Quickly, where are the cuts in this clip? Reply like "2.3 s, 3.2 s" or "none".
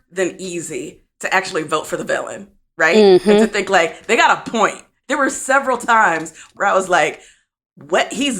5.0 s, 6.5 s